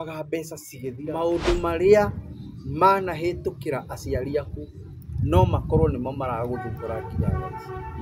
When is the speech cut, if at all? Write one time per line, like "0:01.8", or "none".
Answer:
0:01.1

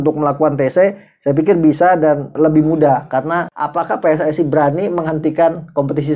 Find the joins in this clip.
0:02.3
0:03.5

